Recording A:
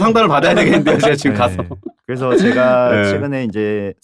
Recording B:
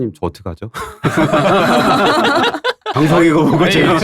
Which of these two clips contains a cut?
B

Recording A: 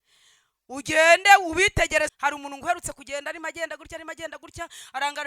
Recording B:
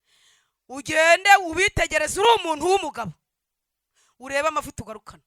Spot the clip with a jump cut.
A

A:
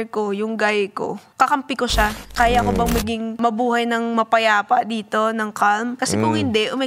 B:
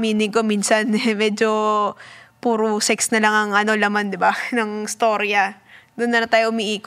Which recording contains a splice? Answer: A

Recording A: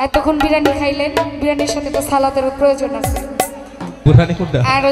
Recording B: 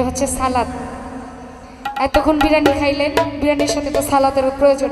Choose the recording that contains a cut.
A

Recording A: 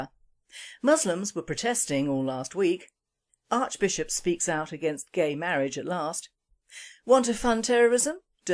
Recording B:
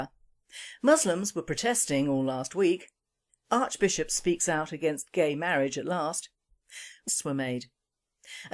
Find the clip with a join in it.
A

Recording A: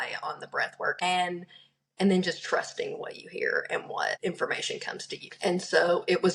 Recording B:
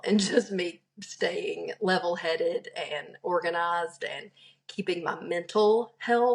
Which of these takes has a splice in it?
A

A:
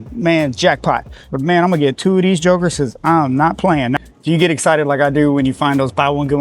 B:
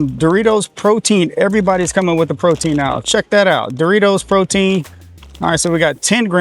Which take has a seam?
A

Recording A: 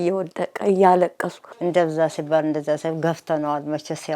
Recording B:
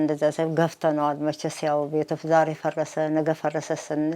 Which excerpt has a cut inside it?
A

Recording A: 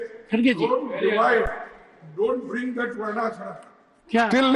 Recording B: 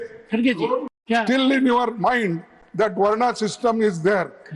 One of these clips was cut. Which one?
B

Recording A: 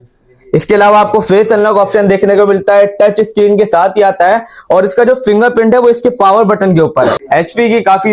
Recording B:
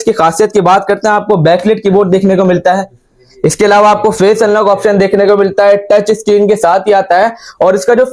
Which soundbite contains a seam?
A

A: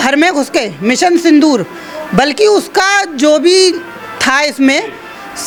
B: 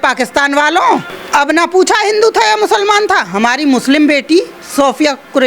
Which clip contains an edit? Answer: B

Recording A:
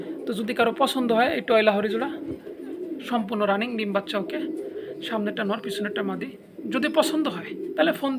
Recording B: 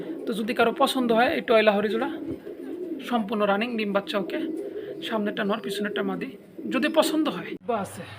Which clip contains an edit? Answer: B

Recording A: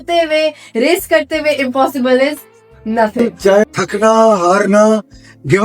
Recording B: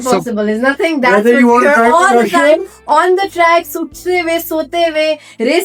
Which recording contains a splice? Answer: A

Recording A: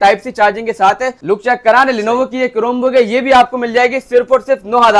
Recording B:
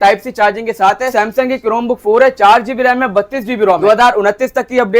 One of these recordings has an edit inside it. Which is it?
B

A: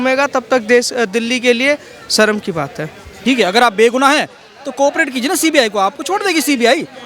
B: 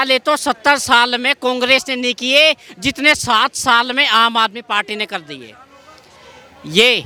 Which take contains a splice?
A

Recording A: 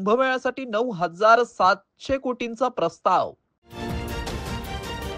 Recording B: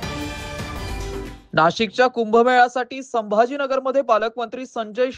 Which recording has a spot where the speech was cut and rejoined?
B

